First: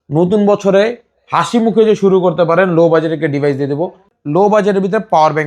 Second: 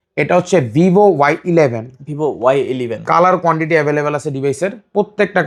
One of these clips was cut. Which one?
first; 1 cut; at 4.1 s

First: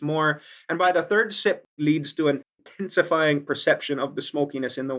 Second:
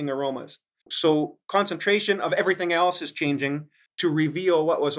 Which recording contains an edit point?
first; 1 cut; at 1.7 s

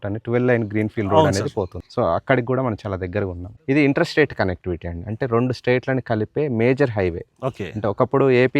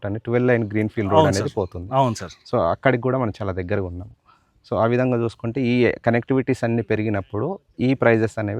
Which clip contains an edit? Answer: first; 2 cuts; at 1.8 s, 3.5 s

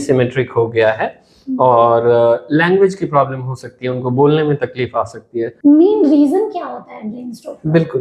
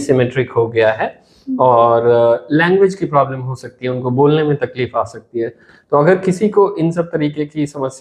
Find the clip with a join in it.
first; 1 cut; at 5.5 s

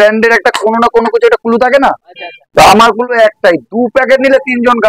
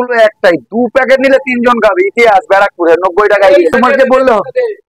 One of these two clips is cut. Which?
second; 1 cut; at 3.7 s

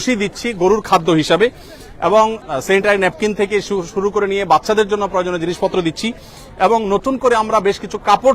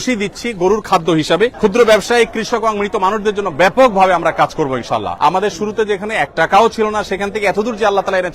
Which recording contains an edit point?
second; 2 cuts; at 1.5 s, 5.1 s

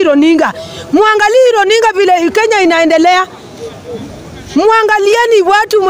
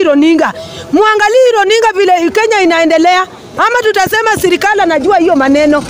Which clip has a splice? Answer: second; 1 cut; at 3.5 s

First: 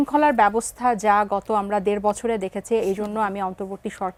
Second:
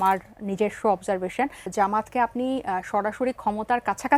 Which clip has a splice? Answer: second; 1 cut; at 1.6 s

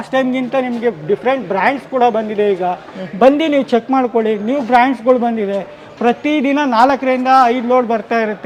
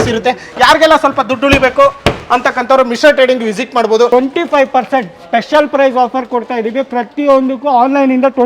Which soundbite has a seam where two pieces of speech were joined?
second; 1 cut; at 4.1 s

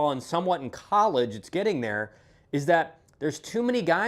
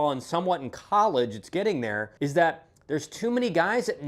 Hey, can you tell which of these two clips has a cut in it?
second; 1 cut; at 2.0 s

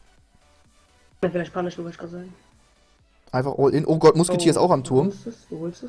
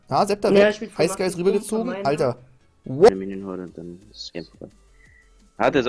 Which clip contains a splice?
second; 1 cut; at 3.1 s

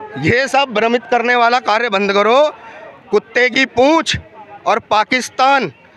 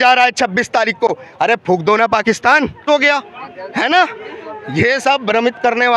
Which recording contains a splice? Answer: second; 1 cut; at 2.8 s

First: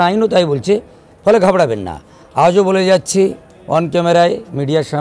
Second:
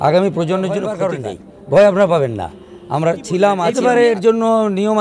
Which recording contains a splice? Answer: second; 2 cuts; at 1.0 s, 3.7 s

